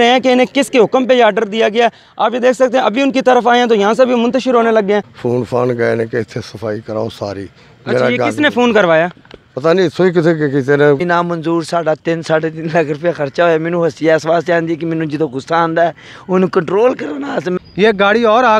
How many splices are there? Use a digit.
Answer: 3